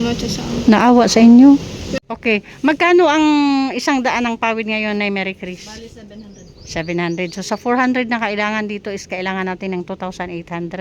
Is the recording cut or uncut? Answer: cut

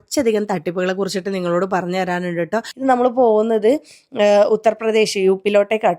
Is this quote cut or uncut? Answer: cut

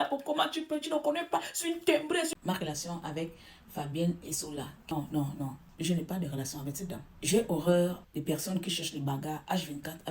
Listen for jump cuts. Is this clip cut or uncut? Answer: cut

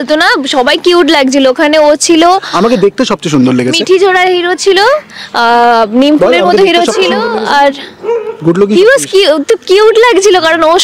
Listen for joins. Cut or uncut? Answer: uncut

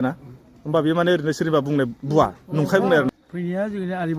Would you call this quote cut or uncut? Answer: cut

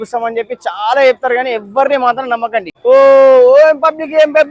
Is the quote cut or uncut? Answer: cut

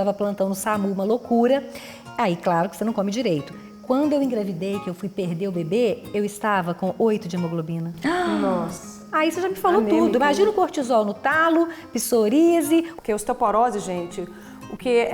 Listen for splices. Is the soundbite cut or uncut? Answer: cut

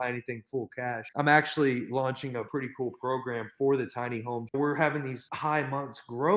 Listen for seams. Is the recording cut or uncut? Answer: cut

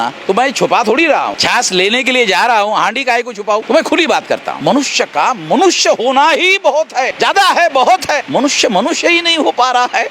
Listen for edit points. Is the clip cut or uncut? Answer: cut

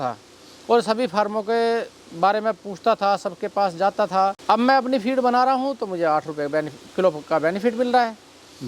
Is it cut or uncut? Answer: cut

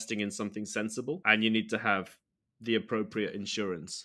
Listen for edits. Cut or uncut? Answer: cut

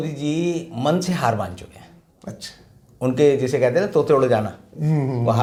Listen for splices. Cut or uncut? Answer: uncut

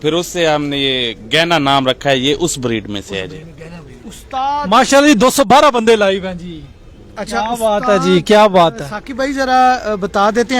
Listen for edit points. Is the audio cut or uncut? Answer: uncut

